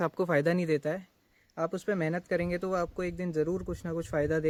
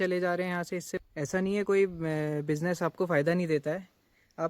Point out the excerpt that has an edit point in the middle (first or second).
second